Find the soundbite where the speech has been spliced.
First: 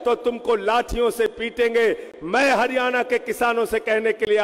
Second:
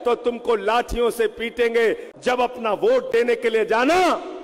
second; 1 cut; at 2.1 s

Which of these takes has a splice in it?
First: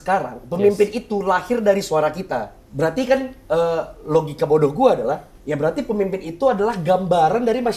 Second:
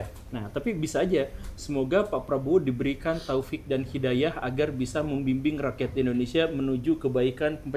first; 1 cut; at 2.6 s

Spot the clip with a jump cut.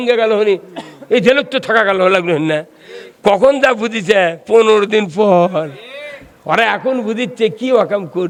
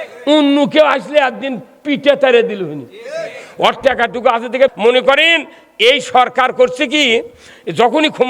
second; 1 cut; at 4.8 s

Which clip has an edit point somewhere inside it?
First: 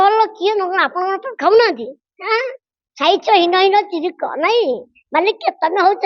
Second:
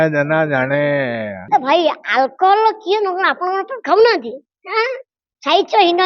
second; 1 cut; at 1.4 s

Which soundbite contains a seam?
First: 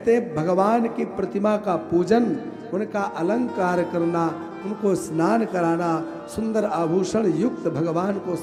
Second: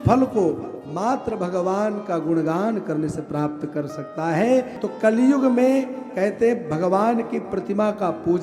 second; 1 cut; at 4.8 s

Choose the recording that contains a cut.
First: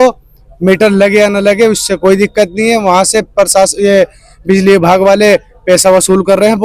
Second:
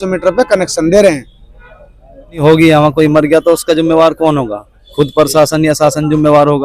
second; 1 cut; at 2.4 s

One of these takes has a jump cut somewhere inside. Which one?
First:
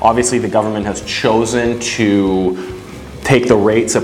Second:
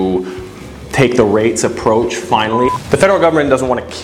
second; 1 cut; at 2.7 s

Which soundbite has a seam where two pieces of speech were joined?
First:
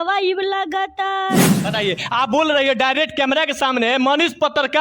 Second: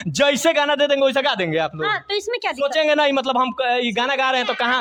first; 1 cut; at 1.6 s

